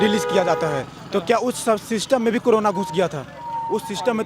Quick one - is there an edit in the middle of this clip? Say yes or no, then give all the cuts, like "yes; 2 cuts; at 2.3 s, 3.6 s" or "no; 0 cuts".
no; 0 cuts